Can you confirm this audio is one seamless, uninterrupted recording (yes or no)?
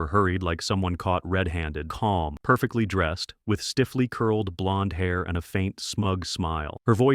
no